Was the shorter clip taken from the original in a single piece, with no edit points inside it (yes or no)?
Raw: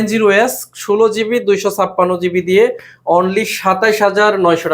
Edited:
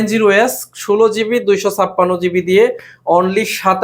yes